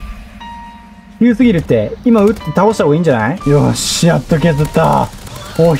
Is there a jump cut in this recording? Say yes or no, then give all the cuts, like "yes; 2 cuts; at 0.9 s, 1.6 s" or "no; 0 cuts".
yes; 1 cut; at 3.4 s